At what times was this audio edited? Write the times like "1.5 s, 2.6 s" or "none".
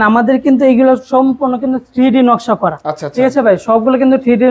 none